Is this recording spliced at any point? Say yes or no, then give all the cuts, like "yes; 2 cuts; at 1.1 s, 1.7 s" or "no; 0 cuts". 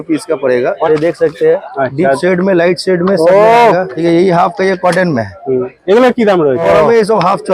yes; 3 cuts; at 0.8 s, 3.9 s, 6.6 s